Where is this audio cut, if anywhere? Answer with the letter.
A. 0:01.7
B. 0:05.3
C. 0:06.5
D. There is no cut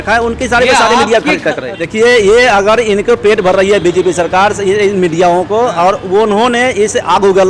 A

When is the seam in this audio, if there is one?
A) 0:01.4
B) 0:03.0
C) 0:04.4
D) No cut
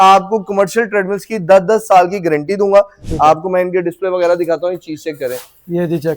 B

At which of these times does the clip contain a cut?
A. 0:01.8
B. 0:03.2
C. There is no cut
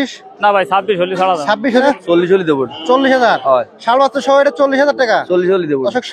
A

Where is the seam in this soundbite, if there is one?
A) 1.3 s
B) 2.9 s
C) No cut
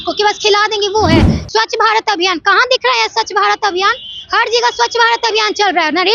A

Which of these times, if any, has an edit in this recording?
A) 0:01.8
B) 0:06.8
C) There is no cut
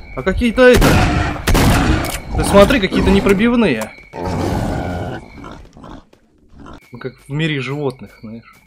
B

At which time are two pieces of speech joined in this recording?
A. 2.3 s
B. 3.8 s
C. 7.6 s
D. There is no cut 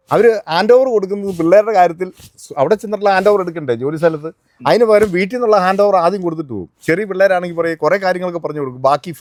D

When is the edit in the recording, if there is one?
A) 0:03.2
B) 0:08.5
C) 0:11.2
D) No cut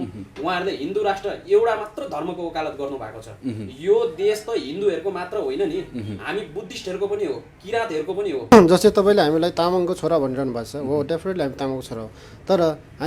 B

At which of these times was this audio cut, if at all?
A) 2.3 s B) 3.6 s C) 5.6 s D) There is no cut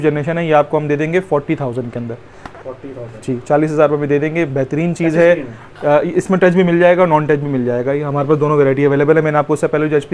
D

